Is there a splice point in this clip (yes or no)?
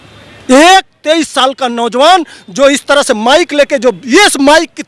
no